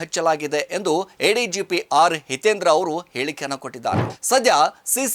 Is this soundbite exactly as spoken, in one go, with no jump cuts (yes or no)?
no